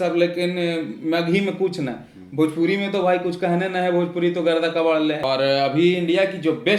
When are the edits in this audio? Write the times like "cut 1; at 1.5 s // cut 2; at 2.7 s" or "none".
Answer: cut 1; at 5.2 s